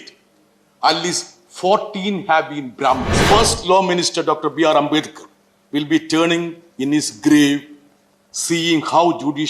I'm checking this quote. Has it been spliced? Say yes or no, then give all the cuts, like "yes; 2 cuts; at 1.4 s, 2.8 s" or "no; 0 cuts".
yes; 1 cut; at 3.2 s